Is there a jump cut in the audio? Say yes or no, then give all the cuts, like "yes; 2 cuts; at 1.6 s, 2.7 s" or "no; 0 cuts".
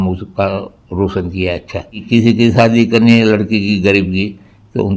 yes; 1 cut; at 2.0 s